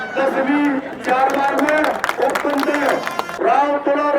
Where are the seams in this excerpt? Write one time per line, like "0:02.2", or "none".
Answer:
0:03.2